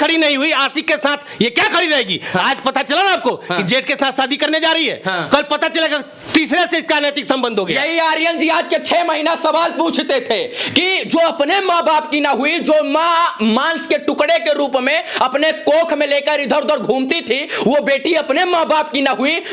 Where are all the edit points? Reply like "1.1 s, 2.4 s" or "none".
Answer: none